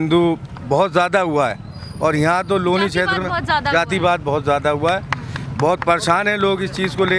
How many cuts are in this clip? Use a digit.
0